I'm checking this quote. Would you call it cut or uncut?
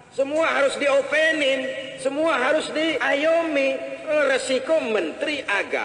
cut